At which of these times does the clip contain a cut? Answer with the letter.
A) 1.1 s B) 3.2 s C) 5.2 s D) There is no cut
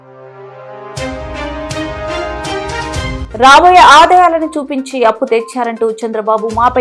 B